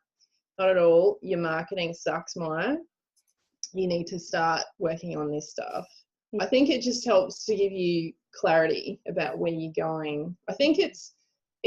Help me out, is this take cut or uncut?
cut